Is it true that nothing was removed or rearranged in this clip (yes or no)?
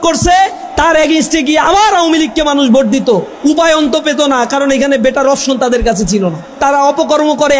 no